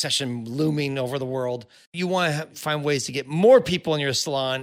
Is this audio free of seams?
no; 1 cut; at 1.9 s

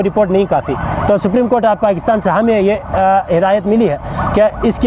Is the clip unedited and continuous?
yes; 0 cuts

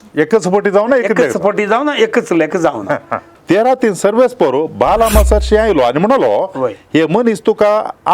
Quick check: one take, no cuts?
no; 1 cut; at 3.3 s

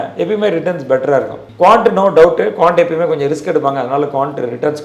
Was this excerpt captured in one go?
no; 1 cut; at 1.4 s

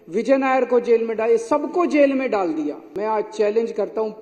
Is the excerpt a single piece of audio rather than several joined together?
no; 1 cut; at 2.9 s

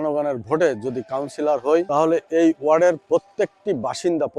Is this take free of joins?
no; 1 cut; at 1.9 s

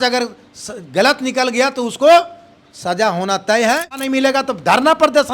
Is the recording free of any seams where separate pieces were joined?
no; 1 cut; at 4.0 s

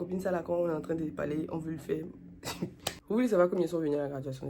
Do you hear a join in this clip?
yes; 1 cut; at 2.9 s

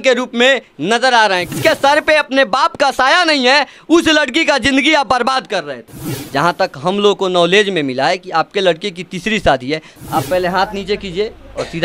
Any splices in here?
yes; 3 cuts; at 1.6 s, 5.8 s, 10.0 s

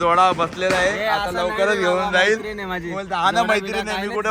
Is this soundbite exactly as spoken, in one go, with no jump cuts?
yes; 0 cuts

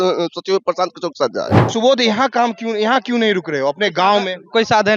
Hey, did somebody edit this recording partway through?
yes; 1 cut; at 1.6 s

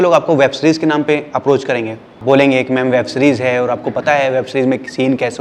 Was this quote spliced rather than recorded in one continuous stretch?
yes; 1 cut; at 2.1 s

